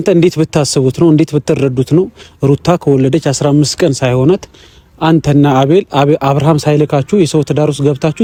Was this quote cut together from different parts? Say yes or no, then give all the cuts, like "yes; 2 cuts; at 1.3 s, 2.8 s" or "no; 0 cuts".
no; 0 cuts